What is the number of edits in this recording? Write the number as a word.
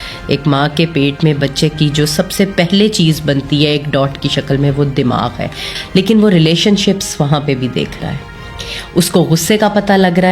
one